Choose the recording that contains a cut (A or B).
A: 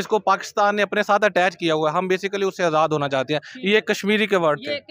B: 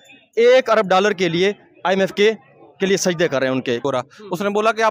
B